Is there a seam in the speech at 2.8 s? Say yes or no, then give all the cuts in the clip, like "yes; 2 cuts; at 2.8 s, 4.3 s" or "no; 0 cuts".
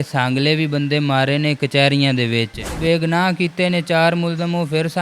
yes; 1 cut; at 2.8 s